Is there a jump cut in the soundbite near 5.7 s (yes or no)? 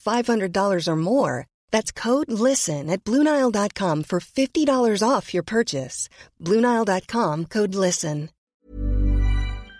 no